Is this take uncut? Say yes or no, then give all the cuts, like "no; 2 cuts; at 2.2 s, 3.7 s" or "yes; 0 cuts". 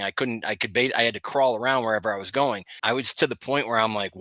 no; 1 cut; at 2.7 s